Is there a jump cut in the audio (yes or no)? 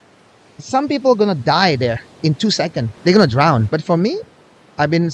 yes